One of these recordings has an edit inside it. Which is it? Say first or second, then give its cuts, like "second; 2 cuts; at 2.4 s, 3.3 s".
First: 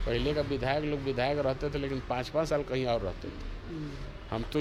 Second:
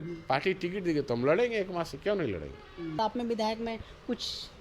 second; 1 cut; at 3.0 s